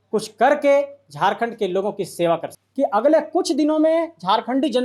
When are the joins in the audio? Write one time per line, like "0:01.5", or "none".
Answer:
0:02.6